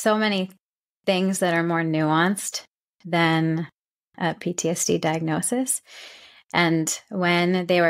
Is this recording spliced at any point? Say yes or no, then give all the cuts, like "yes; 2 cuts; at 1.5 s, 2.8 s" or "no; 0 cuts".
no; 0 cuts